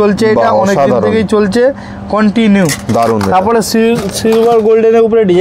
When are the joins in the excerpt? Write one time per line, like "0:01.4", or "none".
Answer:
none